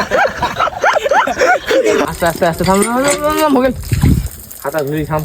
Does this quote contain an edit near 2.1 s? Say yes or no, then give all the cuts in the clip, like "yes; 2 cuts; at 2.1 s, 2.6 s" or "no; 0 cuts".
yes; 1 cut; at 2.1 s